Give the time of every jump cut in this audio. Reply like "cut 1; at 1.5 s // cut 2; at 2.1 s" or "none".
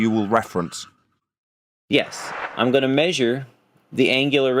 cut 1; at 2.4 s